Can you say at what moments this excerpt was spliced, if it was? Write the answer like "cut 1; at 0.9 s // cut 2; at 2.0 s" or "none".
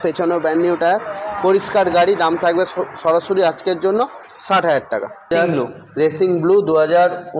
cut 1; at 5.3 s